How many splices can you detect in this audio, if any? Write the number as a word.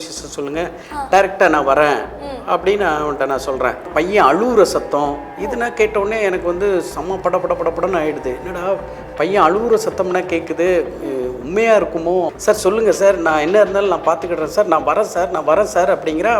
two